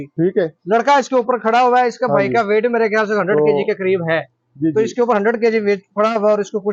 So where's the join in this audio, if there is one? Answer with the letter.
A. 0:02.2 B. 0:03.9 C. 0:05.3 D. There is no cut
D